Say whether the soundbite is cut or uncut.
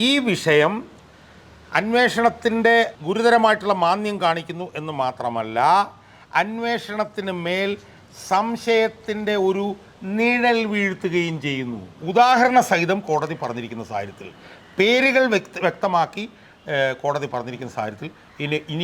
cut